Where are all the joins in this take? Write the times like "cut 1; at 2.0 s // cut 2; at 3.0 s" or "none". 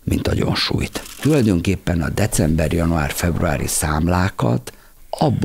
cut 1; at 1.1 s